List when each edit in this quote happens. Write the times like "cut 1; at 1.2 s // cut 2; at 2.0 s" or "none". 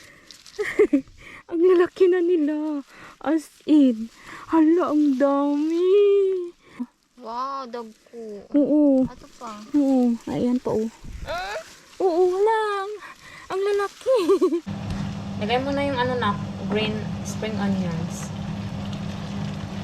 cut 1; at 6.9 s // cut 2; at 14.8 s